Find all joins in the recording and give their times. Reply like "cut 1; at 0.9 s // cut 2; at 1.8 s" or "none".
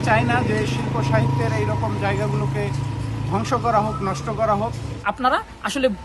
cut 1; at 4.9 s